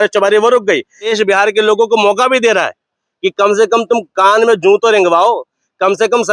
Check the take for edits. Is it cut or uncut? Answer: cut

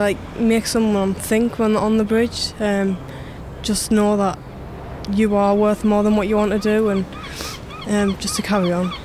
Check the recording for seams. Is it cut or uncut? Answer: uncut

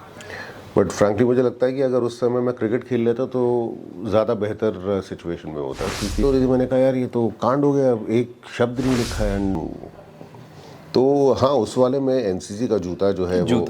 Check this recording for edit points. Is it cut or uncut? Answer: cut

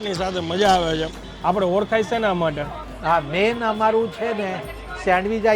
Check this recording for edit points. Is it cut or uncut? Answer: cut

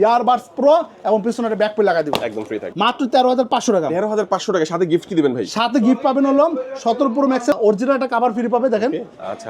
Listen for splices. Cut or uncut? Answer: cut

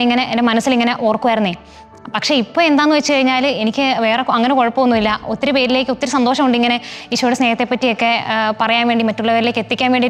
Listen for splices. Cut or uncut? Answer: uncut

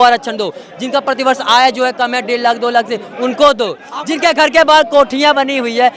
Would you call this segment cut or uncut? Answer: uncut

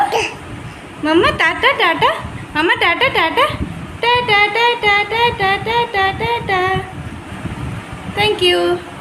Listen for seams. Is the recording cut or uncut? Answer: uncut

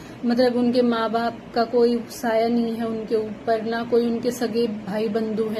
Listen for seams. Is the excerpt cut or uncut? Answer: uncut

